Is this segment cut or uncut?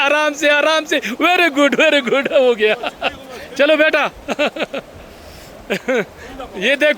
uncut